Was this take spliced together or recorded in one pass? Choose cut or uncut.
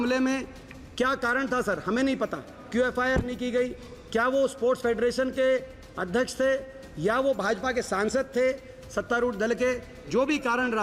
uncut